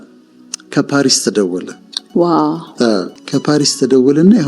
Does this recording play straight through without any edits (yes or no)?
no